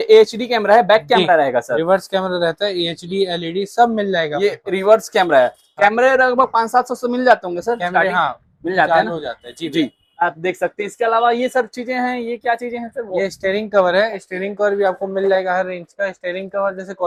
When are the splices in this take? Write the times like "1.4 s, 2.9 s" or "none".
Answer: none